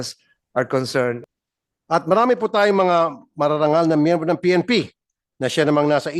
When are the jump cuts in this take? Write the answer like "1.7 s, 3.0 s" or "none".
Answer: 1.3 s